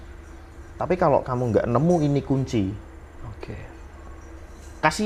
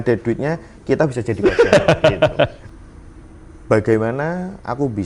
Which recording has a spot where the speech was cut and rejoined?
second; 1 cut; at 2.6 s

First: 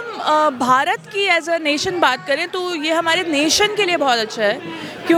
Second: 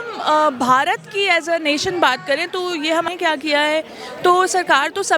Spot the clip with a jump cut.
second; 1 cut; at 3.1 s

